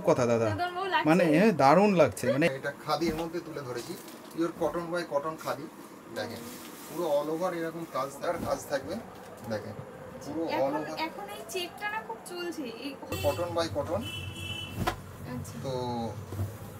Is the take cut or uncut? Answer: cut